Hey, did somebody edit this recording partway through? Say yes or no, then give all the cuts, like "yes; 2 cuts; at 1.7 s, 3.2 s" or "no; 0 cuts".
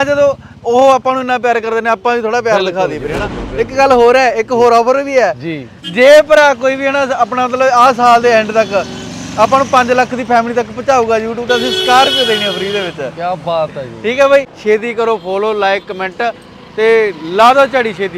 yes; 1 cut; at 14.5 s